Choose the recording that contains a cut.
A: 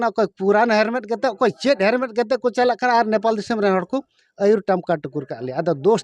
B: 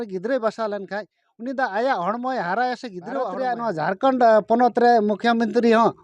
B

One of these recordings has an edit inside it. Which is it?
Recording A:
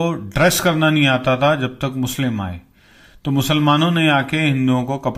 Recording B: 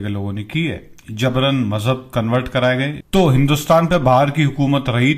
B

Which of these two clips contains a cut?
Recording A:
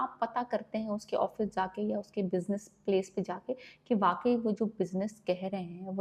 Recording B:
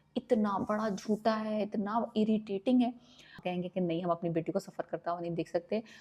B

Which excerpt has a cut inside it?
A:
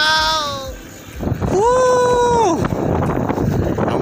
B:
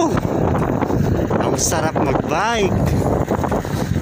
A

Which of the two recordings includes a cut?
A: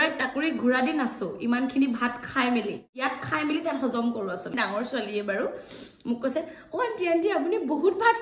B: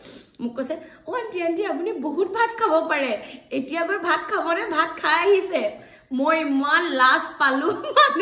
A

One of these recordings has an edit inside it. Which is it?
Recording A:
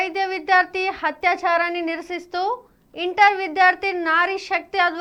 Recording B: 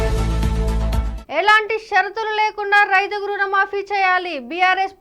B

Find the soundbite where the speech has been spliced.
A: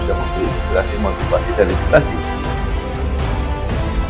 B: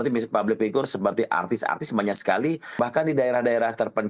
B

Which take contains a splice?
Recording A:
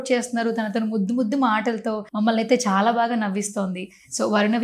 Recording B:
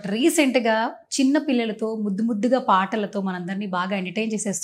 A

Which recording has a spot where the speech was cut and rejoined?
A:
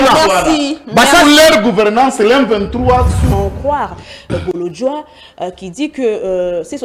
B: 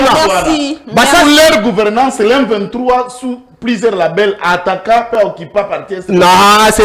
A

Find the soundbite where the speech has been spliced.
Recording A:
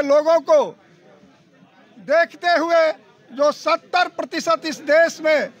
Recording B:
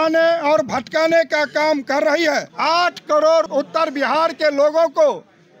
B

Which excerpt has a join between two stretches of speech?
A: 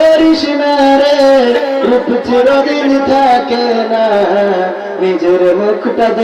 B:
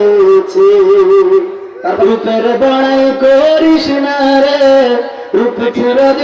B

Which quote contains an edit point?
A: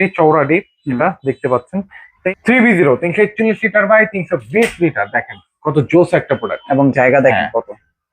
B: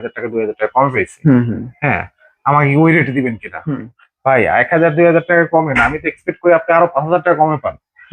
A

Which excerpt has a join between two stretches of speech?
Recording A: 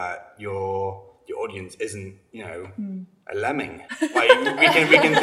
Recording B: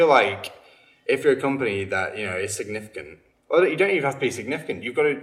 A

